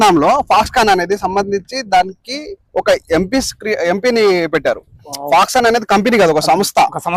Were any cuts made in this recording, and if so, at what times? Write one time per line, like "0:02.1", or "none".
none